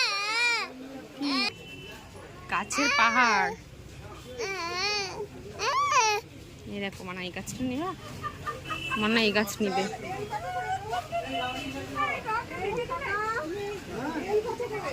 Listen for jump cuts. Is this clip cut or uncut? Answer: cut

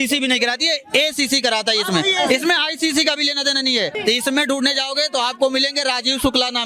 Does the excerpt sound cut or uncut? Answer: cut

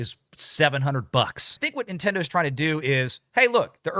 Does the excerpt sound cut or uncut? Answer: cut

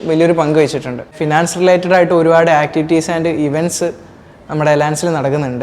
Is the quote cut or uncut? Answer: cut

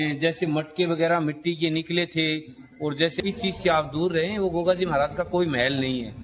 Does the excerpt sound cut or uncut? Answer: cut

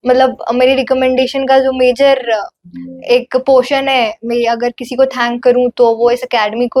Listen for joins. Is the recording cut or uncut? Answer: uncut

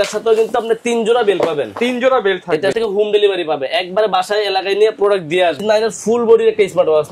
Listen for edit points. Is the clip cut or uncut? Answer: cut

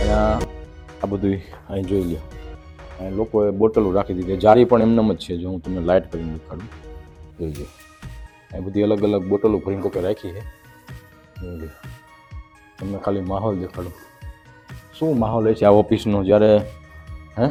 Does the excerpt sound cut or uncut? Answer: uncut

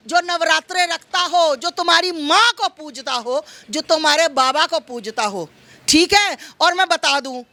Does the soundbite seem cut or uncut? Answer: uncut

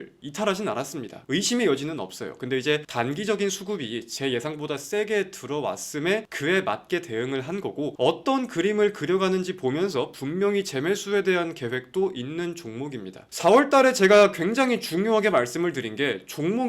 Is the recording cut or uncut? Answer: cut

